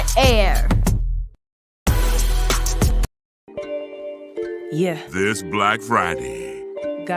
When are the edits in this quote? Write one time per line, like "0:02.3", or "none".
0:01.1
0:03.2